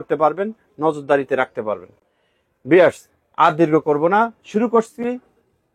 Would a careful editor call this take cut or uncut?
uncut